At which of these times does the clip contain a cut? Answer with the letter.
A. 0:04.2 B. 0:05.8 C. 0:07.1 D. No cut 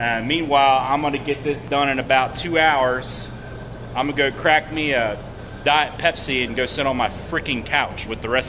D